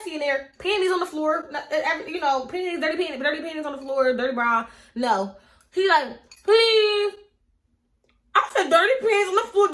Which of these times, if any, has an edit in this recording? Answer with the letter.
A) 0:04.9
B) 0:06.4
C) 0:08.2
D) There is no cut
D